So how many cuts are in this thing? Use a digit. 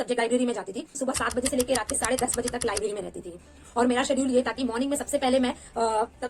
0